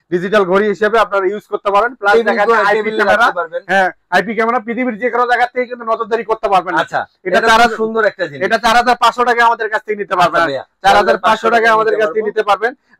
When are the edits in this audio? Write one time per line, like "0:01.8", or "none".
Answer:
none